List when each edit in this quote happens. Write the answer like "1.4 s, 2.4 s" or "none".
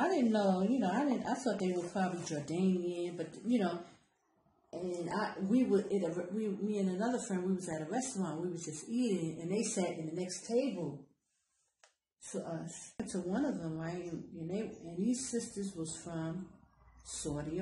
13.1 s